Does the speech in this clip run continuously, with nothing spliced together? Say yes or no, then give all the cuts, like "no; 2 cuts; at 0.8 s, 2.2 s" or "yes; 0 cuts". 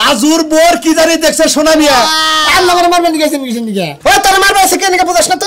no; 1 cut; at 2.3 s